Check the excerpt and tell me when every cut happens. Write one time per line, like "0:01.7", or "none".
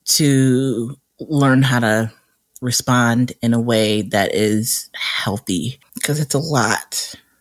0:05.7